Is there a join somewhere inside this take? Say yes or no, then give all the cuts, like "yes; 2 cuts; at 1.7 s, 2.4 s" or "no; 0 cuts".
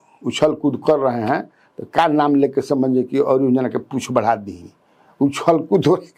no; 0 cuts